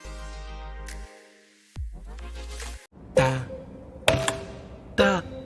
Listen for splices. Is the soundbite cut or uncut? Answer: cut